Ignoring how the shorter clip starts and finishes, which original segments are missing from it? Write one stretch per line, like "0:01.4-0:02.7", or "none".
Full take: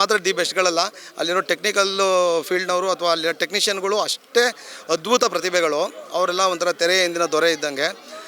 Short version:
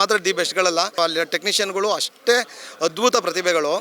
0:00.9-0:03.0